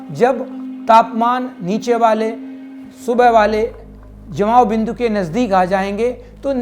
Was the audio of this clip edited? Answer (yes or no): no